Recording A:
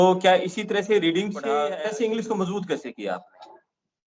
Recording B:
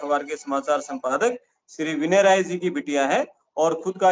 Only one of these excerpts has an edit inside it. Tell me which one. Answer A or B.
A